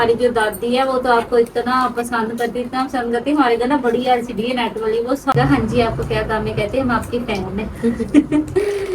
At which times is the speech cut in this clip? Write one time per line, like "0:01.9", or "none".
0:05.3